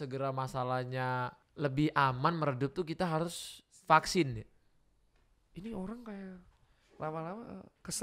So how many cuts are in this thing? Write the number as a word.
one